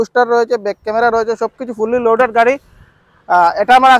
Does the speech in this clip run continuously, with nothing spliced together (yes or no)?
yes